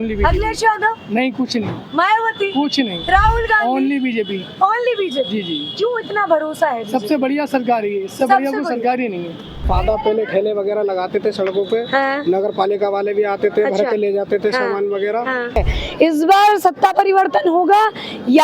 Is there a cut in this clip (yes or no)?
yes